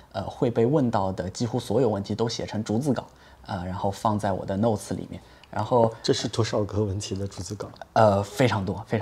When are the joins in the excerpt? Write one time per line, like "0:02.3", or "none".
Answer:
none